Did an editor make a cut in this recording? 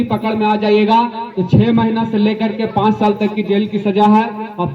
no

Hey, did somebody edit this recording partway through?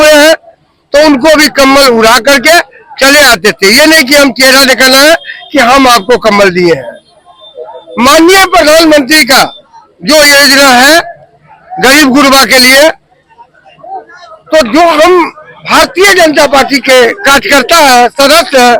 no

